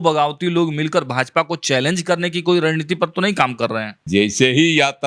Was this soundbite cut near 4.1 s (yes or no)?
yes